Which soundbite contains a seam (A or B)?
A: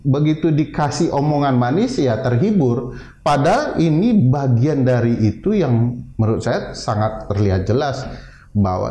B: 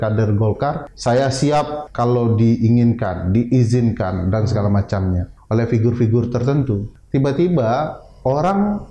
B